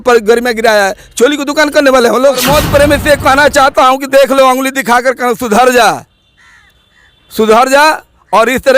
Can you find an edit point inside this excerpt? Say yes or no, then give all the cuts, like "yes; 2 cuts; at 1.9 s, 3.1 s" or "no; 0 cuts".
yes; 1 cut; at 2.4 s